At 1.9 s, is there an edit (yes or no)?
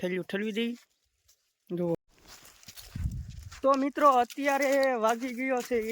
yes